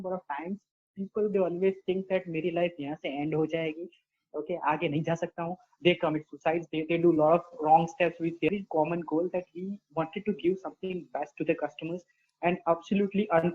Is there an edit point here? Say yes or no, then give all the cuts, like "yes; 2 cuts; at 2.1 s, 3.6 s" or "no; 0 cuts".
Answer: yes; 1 cut; at 8.5 s